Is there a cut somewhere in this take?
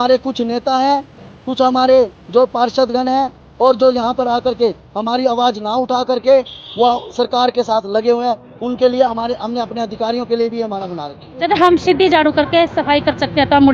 yes; 1 cut; at 11.3 s

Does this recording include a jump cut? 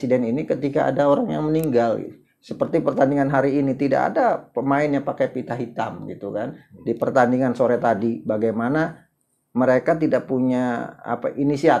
no; 0 cuts

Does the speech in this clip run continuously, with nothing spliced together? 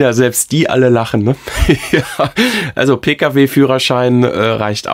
yes; 0 cuts

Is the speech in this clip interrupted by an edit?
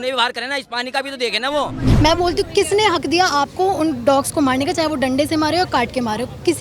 yes; 1 cut; at 1.8 s

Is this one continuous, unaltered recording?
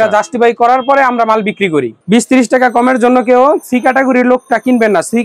no; 1 cut; at 2.0 s

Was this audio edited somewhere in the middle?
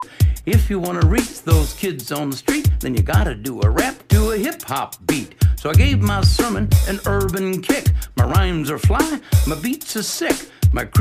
no; 0 cuts

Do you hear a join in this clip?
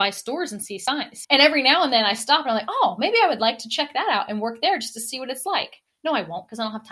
no; 0 cuts

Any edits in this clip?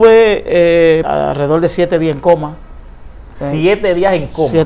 yes; 1 cut; at 1.1 s

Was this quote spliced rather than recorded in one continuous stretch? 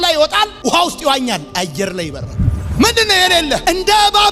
yes; 1 cut; at 2.6 s

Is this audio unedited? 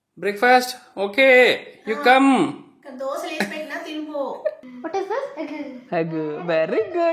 no; 1 cut; at 4.7 s

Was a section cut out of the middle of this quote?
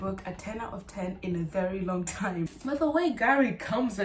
yes; 1 cut; at 2.6 s

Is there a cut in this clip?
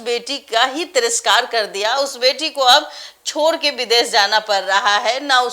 no; 0 cuts

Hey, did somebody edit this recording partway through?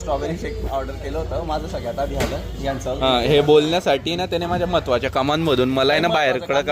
no; 0 cuts

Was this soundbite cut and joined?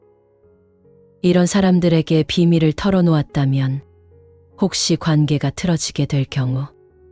no; 0 cuts

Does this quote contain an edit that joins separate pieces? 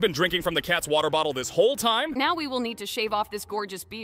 yes; 1 cut; at 2.1 s

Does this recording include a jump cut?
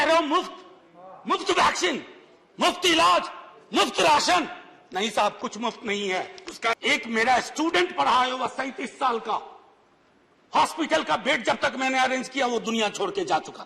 yes; 1 cut; at 6.7 s

